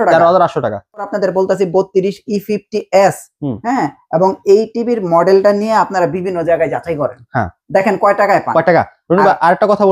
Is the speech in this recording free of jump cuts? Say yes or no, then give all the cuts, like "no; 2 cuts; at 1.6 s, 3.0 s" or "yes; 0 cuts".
no; 1 cut; at 1.1 s